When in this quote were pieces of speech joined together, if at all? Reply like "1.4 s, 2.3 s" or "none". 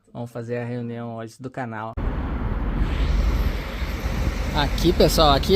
2.0 s

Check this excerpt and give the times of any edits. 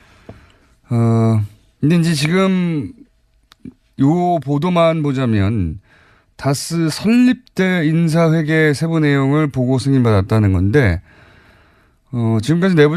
2.0 s

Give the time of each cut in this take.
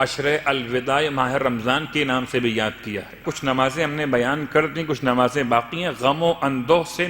3.3 s

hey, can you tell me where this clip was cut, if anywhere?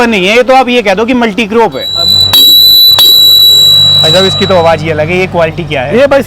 1.9 s

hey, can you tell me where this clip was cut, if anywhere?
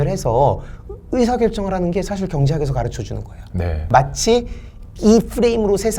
3.8 s

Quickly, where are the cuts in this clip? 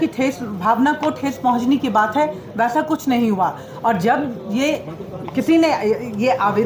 none

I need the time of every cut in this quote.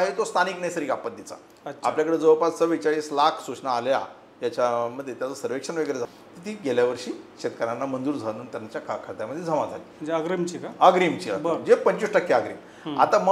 6.1 s

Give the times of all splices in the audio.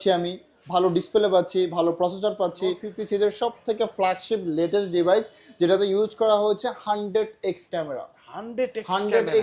2.9 s

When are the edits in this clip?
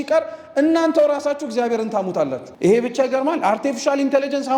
2.4 s

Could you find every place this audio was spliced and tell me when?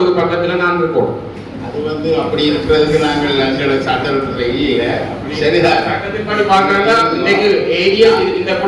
none

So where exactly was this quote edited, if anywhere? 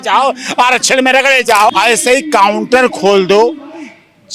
1.7 s

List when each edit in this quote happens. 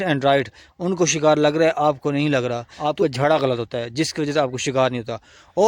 2.7 s

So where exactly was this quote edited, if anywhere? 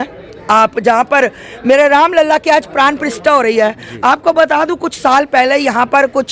none

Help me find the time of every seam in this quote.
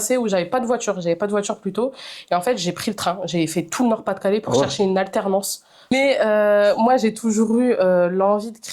5.9 s

